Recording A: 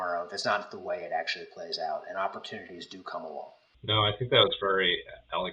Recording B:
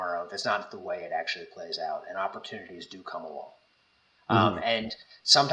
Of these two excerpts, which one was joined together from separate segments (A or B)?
A